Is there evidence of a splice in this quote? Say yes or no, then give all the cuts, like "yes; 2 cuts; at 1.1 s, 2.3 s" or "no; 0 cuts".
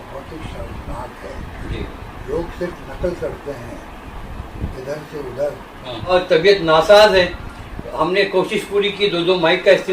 yes; 1 cut; at 6.1 s